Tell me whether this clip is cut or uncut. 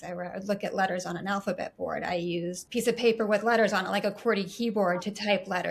cut